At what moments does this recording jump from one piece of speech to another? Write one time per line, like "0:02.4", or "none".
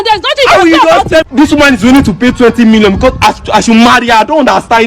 0:01.3